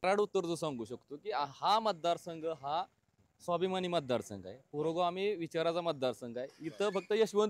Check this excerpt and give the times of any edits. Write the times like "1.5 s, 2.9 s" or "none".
none